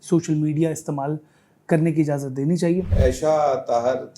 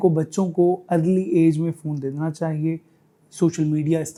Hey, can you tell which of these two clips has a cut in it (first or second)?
first